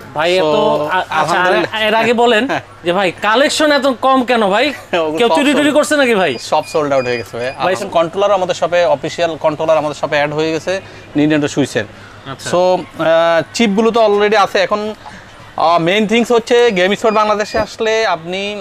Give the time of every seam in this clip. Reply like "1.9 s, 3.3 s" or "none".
7.8 s